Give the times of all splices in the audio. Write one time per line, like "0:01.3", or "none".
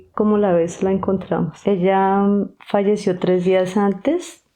0:01.5